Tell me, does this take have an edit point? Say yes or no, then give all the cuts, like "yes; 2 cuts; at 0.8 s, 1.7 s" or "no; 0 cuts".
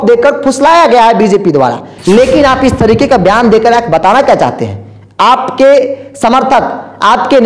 yes; 1 cut; at 1.9 s